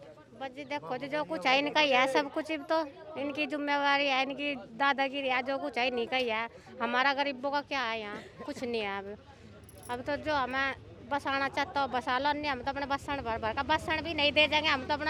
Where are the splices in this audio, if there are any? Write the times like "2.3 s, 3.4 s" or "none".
none